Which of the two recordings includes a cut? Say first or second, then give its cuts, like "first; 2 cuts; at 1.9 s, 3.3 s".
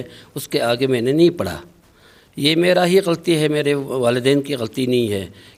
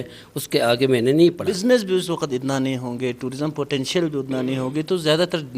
second; 1 cut; at 1.5 s